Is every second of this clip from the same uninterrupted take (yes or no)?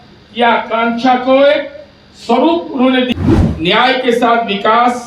no